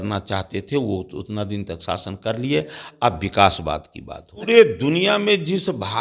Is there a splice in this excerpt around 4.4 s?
yes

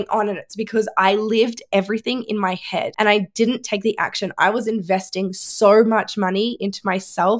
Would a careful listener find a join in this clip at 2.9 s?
yes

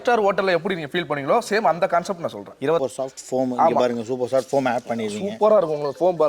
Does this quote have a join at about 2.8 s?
yes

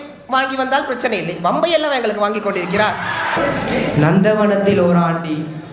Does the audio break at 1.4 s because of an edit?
no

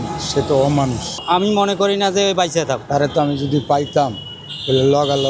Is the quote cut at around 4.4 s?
no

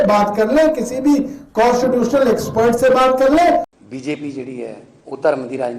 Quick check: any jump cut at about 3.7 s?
yes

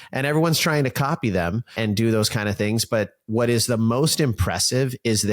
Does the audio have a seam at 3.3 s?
no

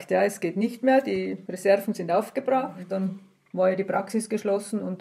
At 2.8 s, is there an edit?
yes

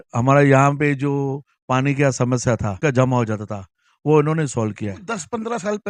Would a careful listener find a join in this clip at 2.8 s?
yes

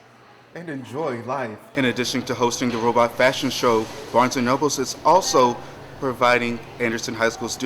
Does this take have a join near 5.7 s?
no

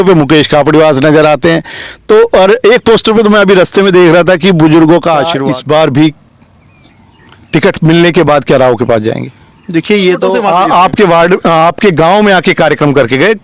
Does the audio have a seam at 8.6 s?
no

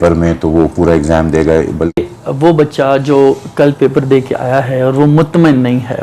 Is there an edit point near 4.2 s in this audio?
no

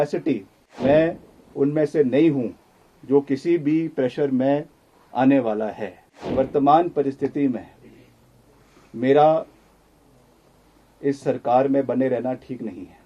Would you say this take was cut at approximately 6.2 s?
yes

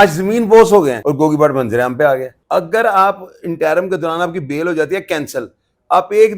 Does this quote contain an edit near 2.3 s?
yes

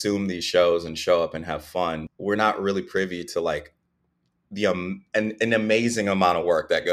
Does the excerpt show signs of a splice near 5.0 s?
no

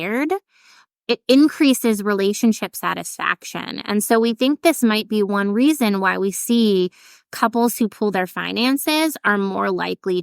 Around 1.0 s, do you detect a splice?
yes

